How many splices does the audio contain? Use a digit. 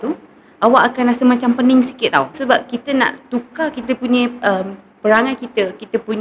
1